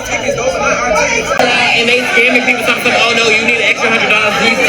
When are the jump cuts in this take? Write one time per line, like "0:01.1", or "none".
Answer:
0:01.4